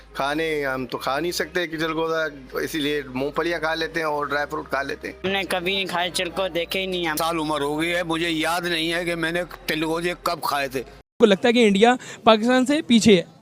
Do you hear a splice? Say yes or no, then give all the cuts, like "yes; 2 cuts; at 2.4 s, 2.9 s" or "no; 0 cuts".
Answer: yes; 2 cuts; at 7.1 s, 11.0 s